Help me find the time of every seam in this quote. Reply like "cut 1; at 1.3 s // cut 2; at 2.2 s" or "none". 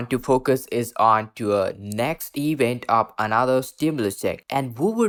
none